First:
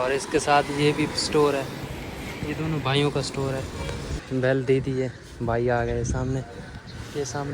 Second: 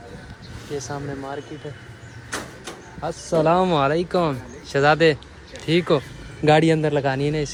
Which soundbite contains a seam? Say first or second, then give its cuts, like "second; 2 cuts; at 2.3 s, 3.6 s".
first; 1 cut; at 4.2 s